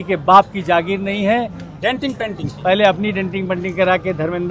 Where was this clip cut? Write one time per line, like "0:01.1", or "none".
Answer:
0:01.7